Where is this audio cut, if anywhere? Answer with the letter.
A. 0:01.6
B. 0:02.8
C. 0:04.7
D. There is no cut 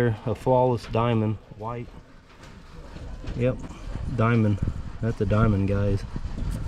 D